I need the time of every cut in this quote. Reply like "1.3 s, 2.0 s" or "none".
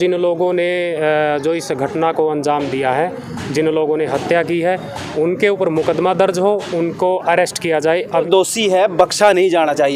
8.2 s